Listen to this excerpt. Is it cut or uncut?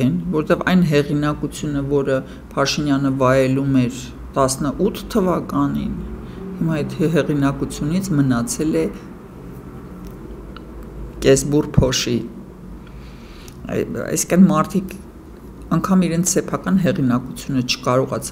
uncut